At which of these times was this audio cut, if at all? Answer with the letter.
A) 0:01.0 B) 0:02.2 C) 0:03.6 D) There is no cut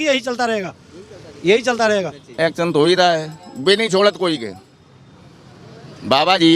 B